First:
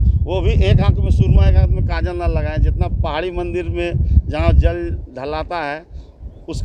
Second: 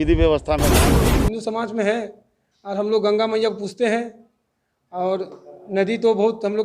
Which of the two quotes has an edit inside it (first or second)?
second